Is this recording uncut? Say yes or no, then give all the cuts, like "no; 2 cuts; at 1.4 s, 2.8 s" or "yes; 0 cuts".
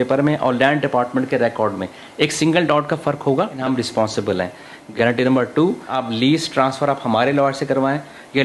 no; 3 cuts; at 3.6 s, 4.8 s, 5.9 s